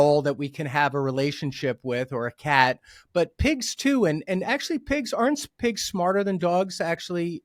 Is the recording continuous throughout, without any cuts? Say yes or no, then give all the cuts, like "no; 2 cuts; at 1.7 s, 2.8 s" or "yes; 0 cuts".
yes; 0 cuts